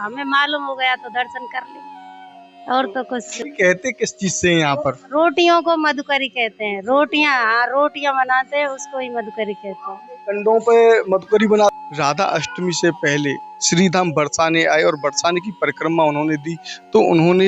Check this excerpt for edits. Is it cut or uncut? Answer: cut